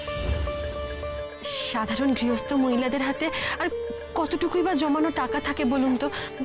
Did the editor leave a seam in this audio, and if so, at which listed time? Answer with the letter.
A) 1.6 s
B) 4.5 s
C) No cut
A